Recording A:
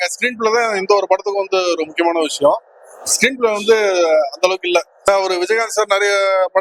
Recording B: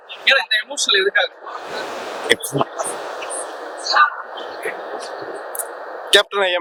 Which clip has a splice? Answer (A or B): A